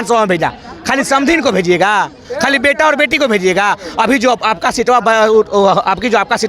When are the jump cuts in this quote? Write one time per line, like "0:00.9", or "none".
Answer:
none